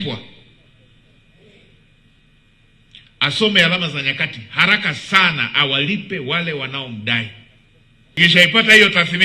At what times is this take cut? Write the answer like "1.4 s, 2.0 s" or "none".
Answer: 8.2 s